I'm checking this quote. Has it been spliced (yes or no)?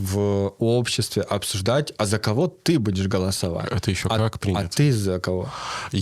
no